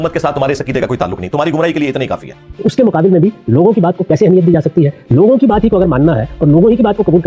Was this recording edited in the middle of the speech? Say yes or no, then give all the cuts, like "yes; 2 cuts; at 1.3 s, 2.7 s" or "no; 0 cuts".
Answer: yes; 1 cut; at 2.5 s